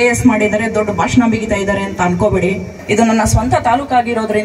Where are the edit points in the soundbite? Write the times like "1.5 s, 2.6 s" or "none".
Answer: 2.7 s